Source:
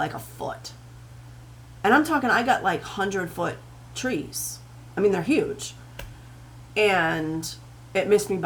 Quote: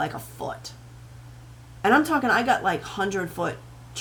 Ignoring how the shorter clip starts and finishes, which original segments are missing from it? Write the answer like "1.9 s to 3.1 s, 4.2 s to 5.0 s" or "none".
none